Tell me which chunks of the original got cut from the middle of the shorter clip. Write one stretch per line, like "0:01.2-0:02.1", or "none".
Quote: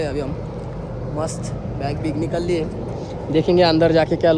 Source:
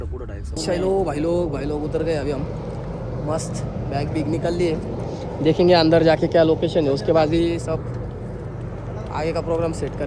none